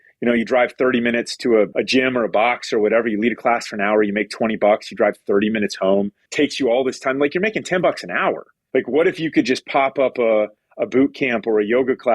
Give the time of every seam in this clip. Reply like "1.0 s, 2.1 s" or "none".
1.7 s, 6.2 s, 8.5 s